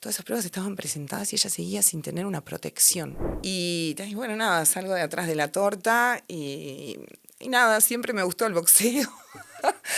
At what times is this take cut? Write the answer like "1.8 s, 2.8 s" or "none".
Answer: 3.2 s